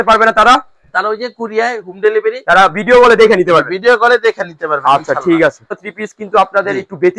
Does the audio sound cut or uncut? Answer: cut